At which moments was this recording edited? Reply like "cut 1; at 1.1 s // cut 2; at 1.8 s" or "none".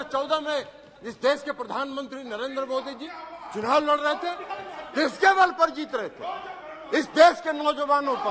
none